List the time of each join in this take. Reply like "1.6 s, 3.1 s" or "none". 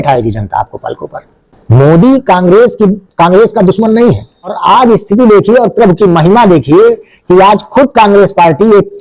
4.6 s